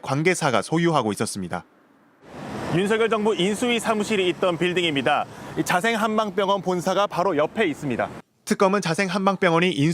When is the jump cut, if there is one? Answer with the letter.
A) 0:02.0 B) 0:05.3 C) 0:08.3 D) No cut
C